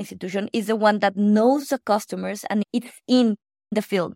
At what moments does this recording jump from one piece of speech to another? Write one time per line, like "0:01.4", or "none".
none